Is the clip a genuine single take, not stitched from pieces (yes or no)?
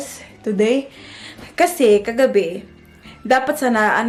yes